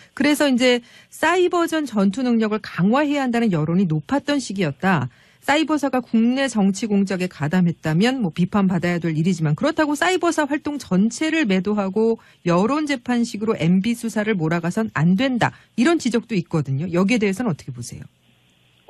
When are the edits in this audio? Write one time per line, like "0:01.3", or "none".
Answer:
0:07.0